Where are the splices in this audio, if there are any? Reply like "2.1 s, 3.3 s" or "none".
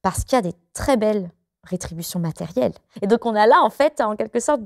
2.9 s